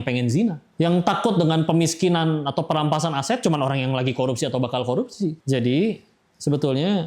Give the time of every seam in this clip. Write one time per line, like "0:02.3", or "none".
none